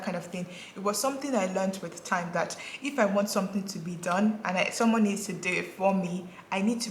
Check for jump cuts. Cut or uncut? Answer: uncut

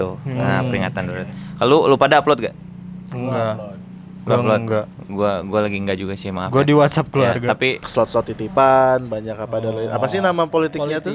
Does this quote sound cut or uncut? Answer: cut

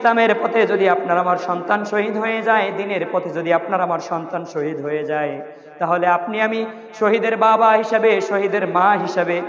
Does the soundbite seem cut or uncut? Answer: uncut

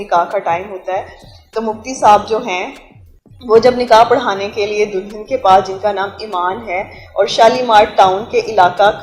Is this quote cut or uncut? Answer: uncut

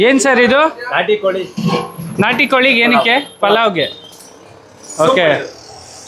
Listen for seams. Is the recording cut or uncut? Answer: uncut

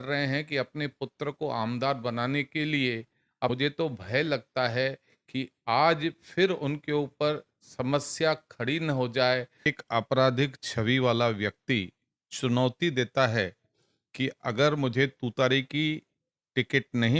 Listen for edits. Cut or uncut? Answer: cut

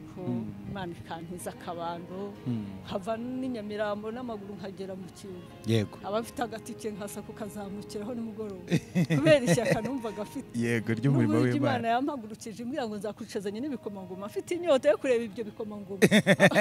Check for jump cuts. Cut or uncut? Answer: uncut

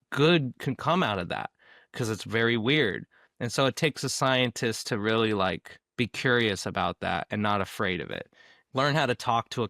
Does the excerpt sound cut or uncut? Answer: cut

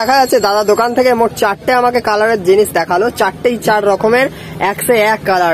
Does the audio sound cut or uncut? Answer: uncut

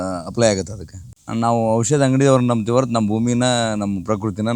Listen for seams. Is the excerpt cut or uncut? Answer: cut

